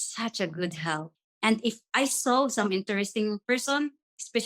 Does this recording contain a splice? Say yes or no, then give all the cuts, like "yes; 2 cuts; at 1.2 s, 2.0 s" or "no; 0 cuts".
yes; 1 cut; at 1.2 s